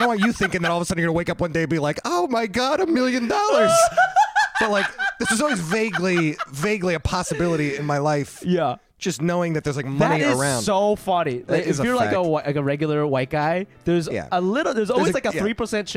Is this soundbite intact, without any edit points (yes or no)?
yes